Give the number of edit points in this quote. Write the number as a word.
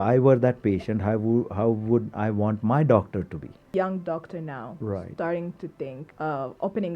two